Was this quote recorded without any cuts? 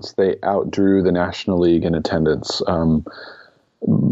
yes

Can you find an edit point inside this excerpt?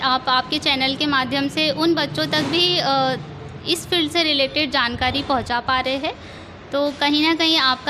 no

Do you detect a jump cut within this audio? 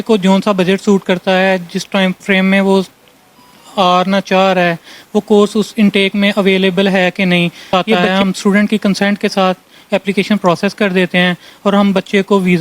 yes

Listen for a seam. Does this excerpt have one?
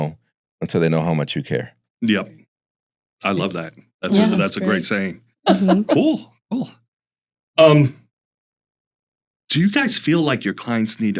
no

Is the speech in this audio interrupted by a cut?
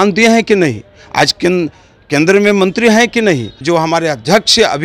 yes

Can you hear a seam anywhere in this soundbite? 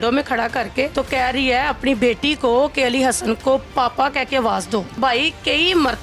yes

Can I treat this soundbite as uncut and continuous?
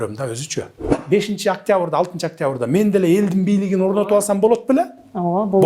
no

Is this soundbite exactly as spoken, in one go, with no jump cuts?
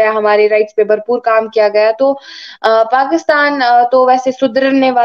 yes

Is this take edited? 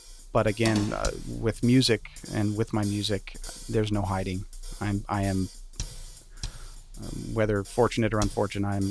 no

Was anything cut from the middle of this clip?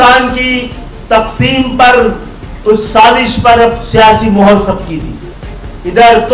no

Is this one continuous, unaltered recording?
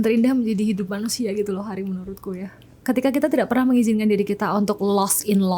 yes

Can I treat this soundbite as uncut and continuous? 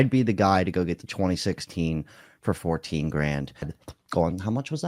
no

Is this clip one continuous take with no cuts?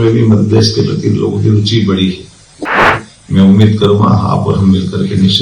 no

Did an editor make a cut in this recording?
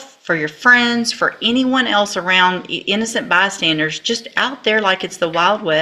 no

